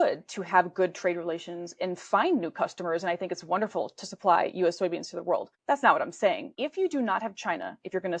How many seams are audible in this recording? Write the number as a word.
two